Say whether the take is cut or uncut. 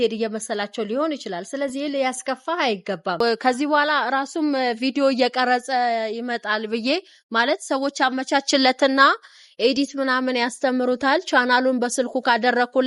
cut